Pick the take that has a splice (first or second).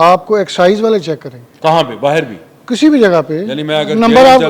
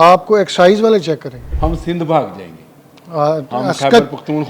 second